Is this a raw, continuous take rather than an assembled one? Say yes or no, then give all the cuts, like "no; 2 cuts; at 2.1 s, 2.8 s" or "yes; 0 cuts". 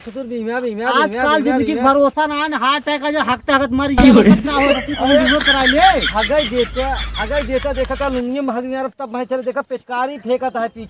no; 2 cuts; at 4.0 s, 4.9 s